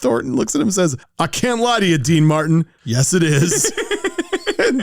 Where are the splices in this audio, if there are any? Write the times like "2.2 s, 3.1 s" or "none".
1.0 s